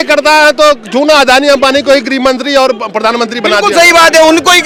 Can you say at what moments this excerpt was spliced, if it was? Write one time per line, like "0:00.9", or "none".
none